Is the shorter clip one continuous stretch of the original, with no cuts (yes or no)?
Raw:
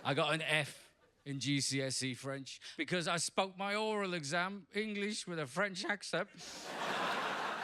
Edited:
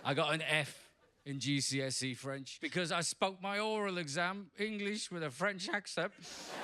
no